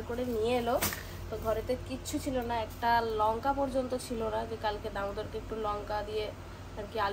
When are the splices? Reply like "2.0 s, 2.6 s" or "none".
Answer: none